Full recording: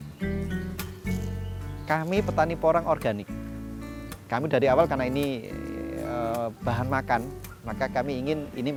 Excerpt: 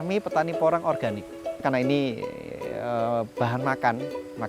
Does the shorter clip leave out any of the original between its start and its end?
yes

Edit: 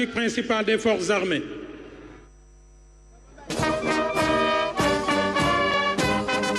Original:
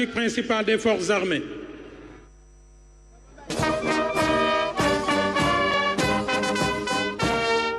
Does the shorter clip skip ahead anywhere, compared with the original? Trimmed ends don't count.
no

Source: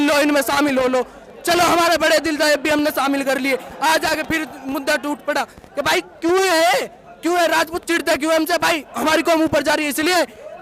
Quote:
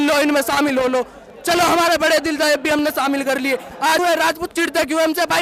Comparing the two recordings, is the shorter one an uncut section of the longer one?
no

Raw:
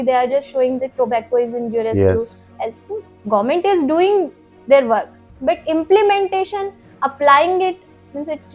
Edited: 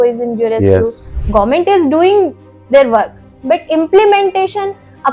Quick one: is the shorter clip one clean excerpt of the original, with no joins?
no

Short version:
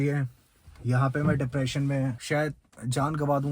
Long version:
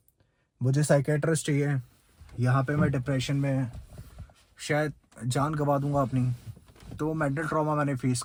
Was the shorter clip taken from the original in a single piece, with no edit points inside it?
no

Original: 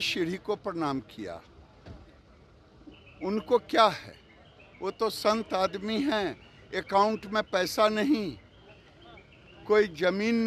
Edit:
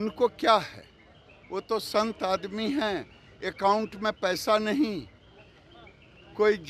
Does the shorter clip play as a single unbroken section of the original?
yes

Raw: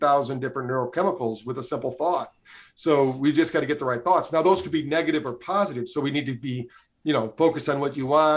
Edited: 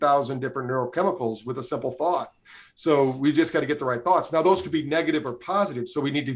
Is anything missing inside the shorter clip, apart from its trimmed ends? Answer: no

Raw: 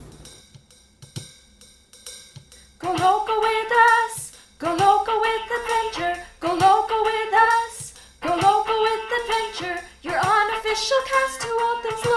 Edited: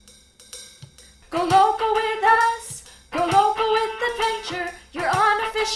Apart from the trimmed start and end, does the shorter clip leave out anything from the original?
yes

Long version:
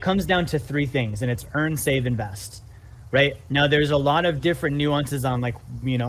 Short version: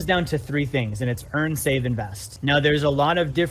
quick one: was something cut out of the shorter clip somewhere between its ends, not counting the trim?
yes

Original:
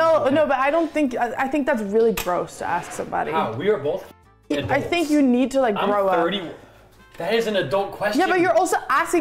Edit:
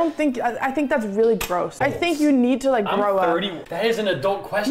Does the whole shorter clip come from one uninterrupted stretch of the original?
no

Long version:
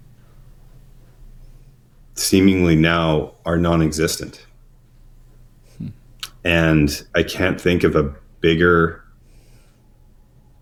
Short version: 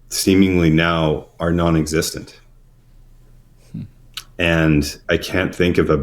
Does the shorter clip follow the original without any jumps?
yes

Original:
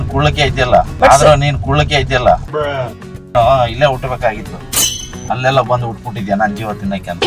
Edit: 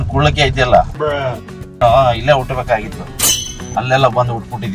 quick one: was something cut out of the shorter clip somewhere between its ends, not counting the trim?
yes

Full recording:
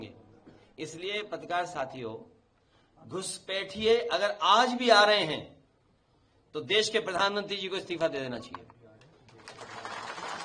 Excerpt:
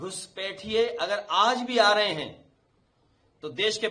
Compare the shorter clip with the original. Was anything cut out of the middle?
no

